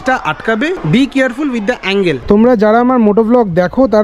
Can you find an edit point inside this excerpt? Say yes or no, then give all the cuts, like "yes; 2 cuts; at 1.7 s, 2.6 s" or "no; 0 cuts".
yes; 1 cut; at 2.2 s